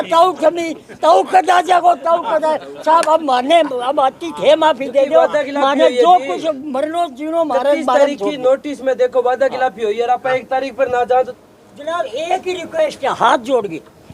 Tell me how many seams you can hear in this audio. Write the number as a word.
one